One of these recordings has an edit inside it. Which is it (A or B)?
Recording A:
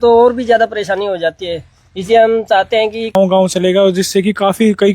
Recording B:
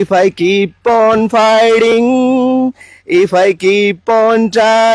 A